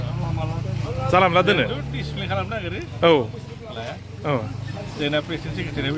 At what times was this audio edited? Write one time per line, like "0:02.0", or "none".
none